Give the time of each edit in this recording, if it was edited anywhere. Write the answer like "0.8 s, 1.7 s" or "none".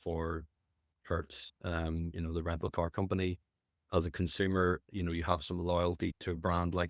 none